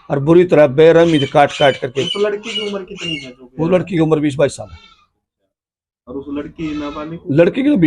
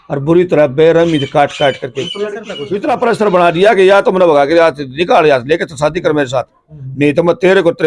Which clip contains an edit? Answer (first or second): second